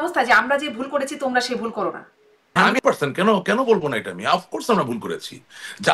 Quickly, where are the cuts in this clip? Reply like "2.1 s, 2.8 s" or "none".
2.7 s